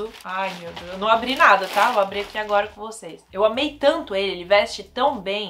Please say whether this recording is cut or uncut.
cut